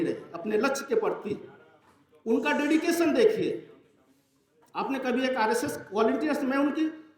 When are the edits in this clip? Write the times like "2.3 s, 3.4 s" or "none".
none